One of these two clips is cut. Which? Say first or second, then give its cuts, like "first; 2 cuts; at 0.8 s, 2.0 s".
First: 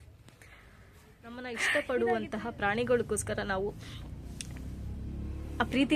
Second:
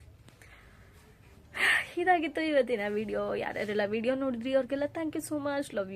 first; 1 cut; at 1.4 s